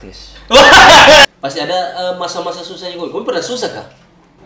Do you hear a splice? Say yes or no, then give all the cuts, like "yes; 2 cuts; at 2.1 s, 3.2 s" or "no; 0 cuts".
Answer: yes; 1 cut; at 1.3 s